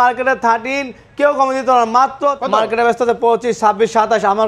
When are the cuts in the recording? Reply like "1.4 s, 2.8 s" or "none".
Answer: 2.4 s